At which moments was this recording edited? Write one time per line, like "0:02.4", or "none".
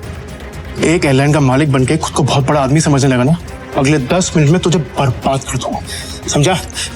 0:03.6